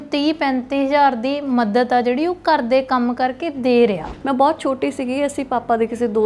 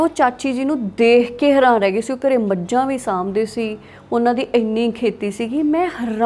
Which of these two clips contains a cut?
first; 1 cut; at 4.0 s

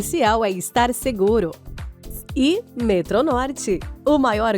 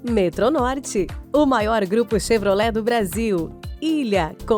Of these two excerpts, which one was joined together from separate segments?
first; 1 cut; at 1.6 s

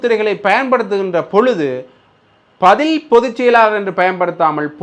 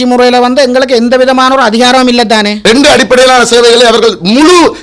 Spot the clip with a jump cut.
second; 1 cut; at 2.5 s

